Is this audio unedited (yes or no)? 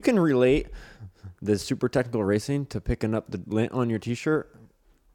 yes